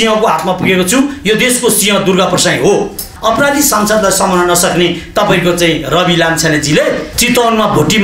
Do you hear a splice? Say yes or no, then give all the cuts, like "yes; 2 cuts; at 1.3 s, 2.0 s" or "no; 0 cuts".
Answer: yes; 2 cuts; at 3.1 s, 7.1 s